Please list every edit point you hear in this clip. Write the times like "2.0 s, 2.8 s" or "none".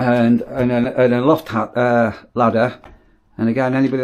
none

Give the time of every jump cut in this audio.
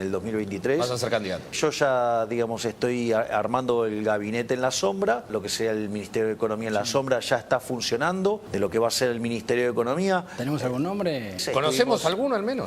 1.6 s, 5.3 s, 8.5 s, 11.4 s

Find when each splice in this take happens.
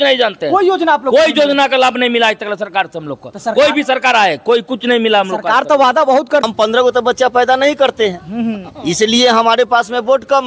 6.5 s

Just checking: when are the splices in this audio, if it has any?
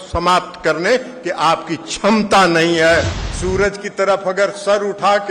3.2 s

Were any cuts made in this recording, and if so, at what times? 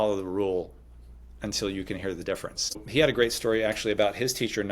2.8 s

